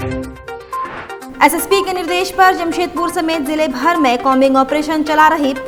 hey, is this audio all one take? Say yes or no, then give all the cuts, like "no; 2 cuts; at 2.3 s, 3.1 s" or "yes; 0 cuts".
yes; 0 cuts